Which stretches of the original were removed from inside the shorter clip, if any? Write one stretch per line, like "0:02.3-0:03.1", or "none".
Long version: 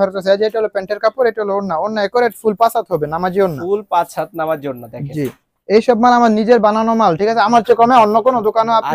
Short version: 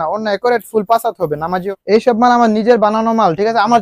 0:03.3-0:05.5